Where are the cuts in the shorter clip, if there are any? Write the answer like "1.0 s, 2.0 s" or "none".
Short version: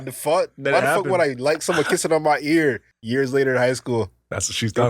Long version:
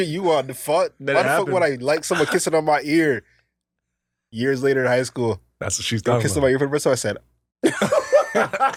2.9 s